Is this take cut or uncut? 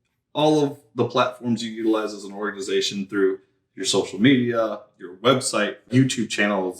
cut